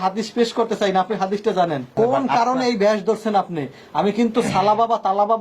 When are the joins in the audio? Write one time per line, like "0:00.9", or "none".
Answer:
0:01.9